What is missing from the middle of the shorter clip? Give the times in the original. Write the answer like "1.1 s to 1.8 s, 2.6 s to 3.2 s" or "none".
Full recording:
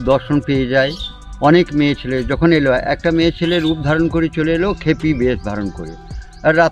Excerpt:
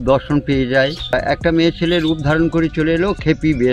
1.1 s to 2.7 s